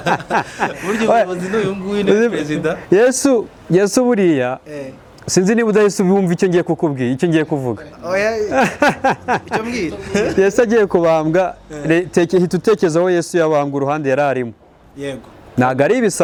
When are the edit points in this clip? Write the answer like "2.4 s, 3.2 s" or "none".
none